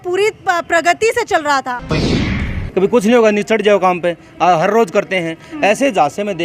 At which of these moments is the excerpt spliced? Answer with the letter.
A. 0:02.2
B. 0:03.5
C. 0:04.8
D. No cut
A